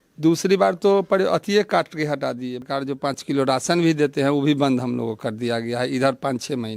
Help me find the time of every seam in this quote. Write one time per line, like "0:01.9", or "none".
0:02.6